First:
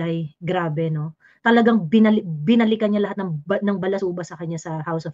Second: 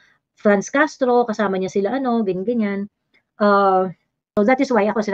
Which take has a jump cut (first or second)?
second